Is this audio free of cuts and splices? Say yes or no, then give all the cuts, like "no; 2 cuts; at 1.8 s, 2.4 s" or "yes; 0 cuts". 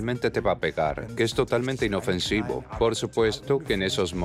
no; 1 cut; at 2.7 s